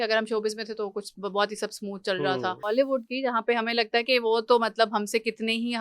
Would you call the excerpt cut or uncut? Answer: cut